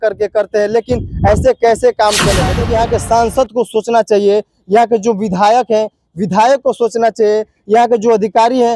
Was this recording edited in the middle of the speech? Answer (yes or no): yes